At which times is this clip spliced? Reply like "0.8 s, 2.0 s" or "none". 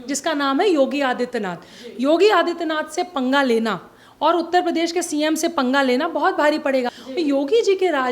6.9 s

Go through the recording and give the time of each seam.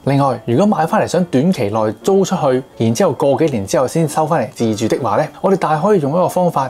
2.7 s, 5.3 s

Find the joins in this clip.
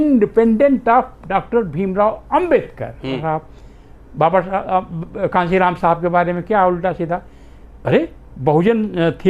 3.2 s

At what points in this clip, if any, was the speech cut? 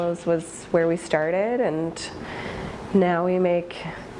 none

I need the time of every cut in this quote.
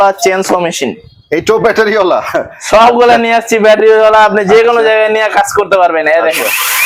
none

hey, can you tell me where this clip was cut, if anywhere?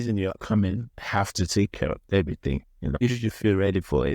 0.9 s

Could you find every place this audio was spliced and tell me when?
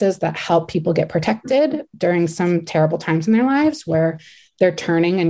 none

